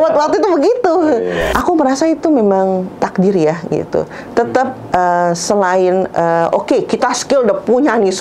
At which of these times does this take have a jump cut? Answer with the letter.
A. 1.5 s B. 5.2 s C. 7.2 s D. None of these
A